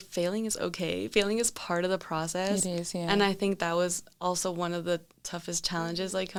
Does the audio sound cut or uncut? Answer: uncut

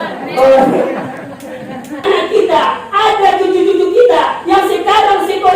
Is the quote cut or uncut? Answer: cut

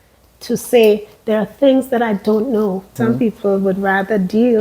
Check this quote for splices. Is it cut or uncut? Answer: cut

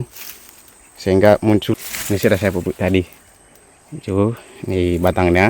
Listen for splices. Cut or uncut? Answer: cut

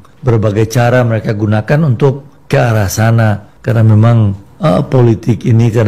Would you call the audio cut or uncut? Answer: cut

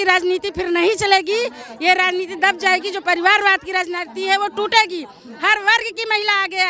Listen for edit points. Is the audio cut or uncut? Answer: uncut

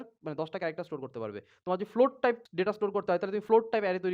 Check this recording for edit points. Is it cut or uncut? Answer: cut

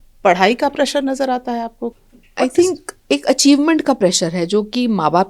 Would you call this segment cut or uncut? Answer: cut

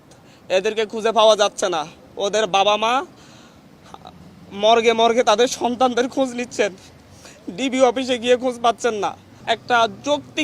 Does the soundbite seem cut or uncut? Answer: cut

